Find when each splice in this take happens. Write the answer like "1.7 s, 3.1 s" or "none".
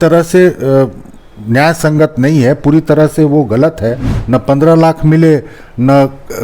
4.1 s